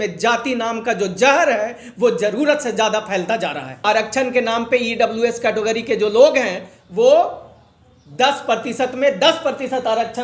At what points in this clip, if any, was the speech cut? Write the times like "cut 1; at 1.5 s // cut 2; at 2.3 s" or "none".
cut 1; at 3.8 s